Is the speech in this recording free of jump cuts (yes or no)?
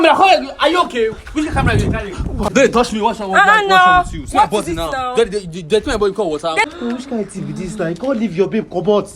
no